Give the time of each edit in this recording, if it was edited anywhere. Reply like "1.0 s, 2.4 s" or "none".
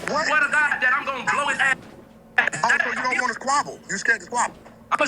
none

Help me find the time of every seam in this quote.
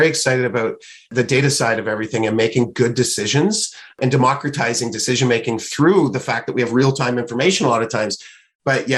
none

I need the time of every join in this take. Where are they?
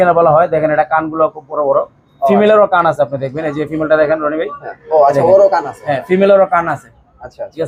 none

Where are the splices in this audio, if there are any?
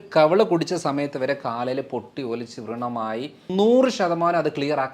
3.5 s

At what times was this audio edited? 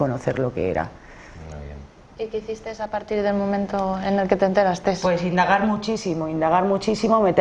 4.6 s

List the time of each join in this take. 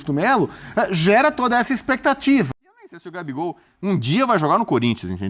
2.5 s

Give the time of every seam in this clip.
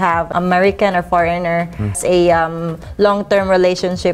2.0 s

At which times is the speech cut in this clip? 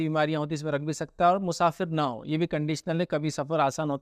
none

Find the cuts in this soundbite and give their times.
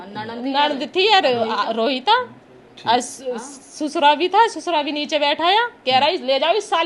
none

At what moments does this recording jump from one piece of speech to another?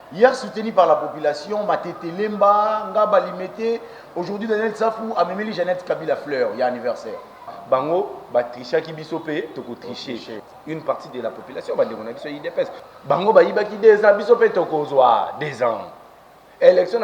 7.6 s, 10.4 s, 12.9 s

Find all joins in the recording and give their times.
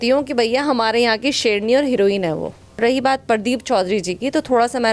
2.8 s

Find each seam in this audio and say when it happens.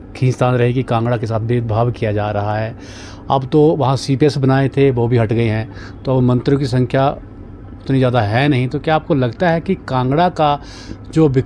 none

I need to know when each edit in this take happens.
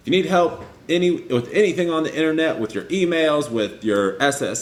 none

